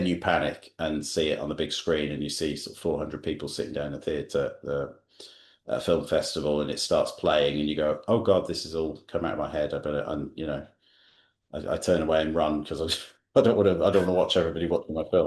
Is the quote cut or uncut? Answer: uncut